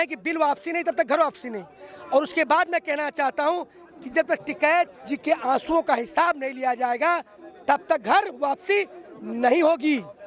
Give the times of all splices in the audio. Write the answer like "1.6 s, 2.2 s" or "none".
none

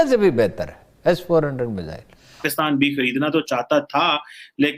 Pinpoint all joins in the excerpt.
2.4 s

